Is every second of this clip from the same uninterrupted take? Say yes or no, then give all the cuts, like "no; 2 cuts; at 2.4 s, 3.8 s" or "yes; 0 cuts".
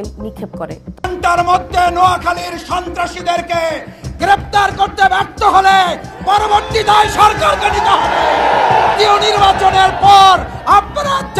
no; 1 cut; at 1.0 s